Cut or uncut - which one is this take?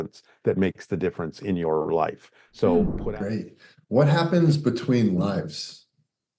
cut